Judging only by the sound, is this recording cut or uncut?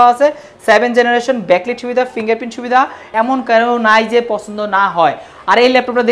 cut